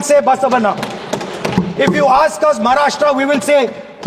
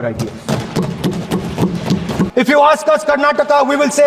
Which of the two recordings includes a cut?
second; 1 cut; at 2.3 s

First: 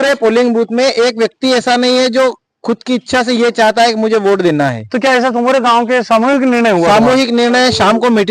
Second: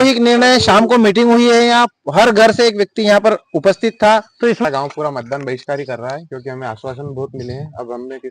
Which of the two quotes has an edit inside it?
second; 1 cut; at 4.6 s

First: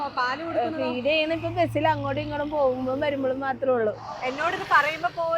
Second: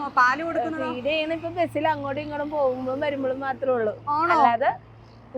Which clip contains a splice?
first; 1 cut; at 4.0 s

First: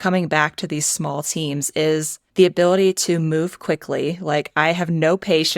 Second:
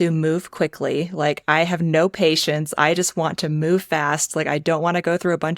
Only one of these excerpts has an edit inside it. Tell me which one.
first; 1 cut; at 2.2 s

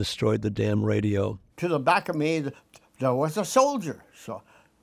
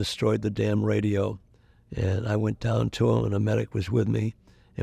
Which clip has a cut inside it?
first; 1 cut; at 1.4 s

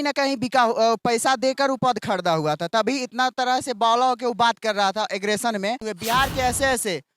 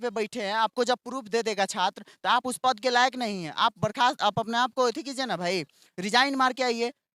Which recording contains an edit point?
first; 1 cut; at 5.9 s

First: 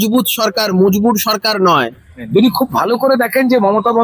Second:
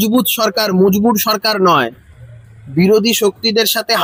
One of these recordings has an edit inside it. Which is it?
first; 1 cut; at 2.3 s

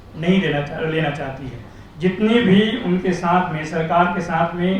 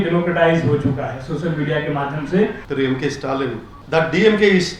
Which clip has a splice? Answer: second; 2 cuts; at 2.6 s, 3.7 s

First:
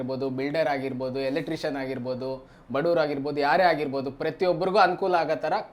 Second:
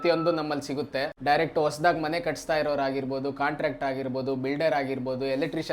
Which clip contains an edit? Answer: second; 1 cut; at 1.1 s

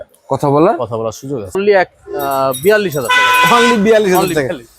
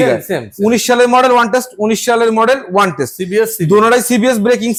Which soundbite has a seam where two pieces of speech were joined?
first; 1 cut; at 1.6 s

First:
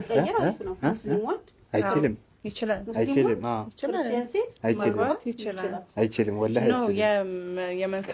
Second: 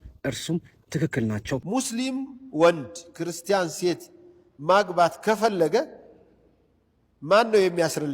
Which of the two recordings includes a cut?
second; 1 cut; at 1.6 s

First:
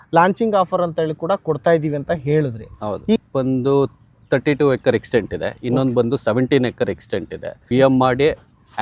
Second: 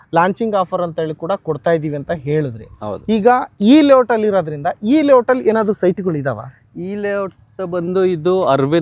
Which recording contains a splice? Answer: first; 2 cuts; at 3.2 s, 7.5 s

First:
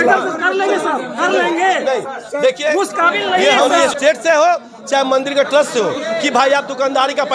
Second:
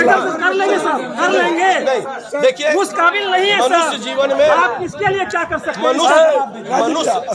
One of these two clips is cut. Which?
first; 1 cut; at 3.6 s

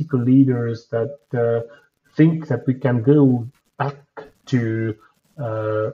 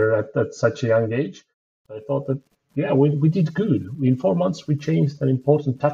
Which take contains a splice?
second; 1 cut; at 1.9 s

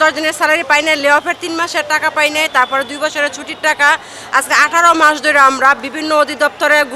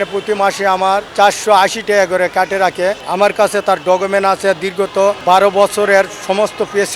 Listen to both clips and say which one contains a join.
second; 3 cuts; at 1.1 s, 3.0 s, 5.2 s

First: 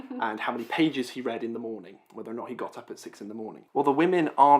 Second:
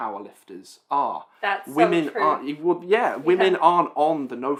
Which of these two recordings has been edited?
first; 1 cut; at 3.6 s

